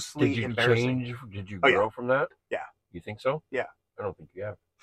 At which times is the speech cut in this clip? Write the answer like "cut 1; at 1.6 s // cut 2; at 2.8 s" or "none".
none